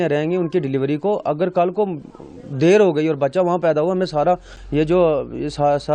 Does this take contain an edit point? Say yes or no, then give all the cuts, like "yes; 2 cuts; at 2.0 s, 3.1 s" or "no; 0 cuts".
no; 0 cuts